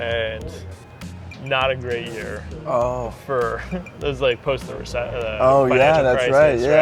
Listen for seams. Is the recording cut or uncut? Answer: uncut